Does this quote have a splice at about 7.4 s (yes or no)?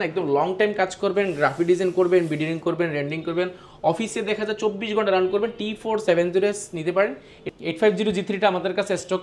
yes